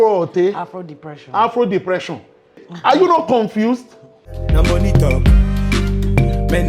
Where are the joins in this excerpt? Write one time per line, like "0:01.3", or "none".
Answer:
0:02.6
0:04.4